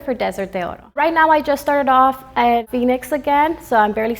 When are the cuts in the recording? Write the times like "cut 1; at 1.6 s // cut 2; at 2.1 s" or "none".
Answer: cut 1; at 0.9 s // cut 2; at 2.6 s